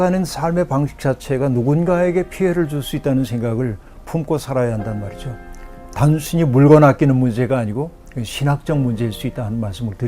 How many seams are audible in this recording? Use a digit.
1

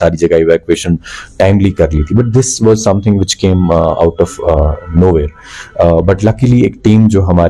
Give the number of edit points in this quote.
0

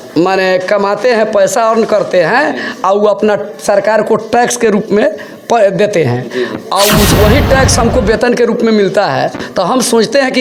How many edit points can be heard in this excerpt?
0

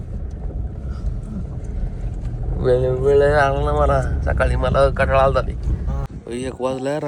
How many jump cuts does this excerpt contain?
1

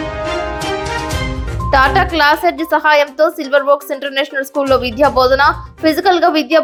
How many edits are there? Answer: 0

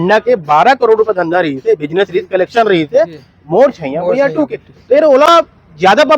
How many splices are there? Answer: 0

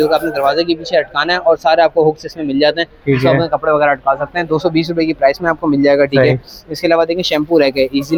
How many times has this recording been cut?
0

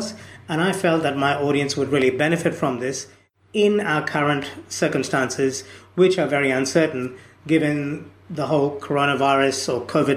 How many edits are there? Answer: 0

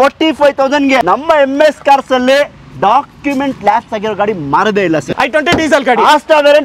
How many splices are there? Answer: 2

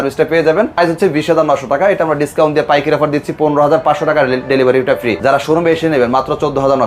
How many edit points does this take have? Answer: 2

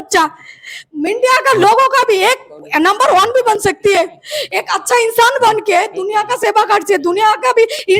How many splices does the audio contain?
0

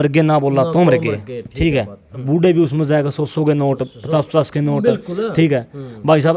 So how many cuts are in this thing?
1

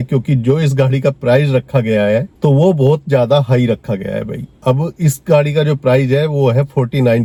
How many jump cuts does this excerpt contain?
0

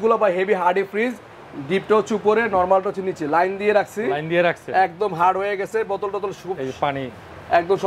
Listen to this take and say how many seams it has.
0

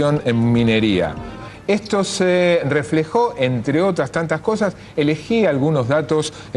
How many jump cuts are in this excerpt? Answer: 1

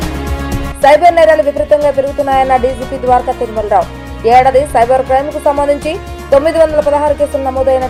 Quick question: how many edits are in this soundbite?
0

